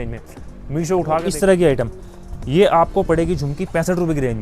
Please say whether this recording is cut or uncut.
cut